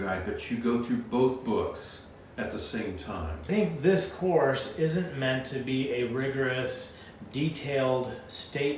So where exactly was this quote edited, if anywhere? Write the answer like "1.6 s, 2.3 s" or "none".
3.5 s